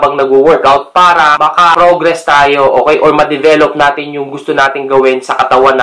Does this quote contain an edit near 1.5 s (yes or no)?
yes